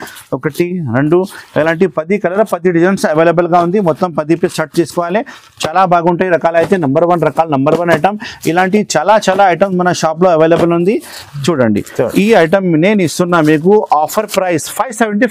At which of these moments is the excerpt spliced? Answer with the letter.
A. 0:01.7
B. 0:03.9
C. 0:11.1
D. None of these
D